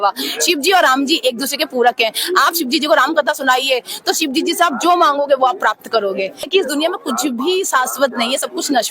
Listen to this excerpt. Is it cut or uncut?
cut